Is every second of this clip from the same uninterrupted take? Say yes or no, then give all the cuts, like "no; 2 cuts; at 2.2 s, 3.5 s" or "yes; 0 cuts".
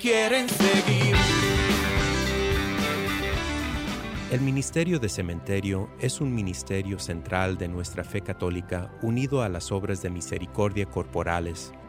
no; 1 cut; at 4.2 s